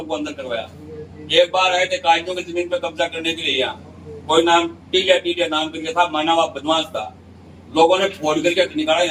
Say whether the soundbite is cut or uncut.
uncut